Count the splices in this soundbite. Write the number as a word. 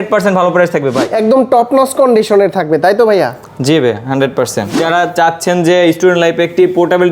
two